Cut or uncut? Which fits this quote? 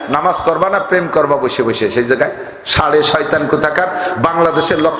uncut